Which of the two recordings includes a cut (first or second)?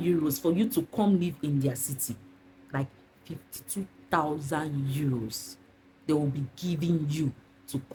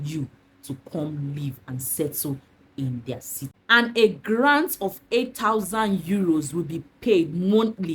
second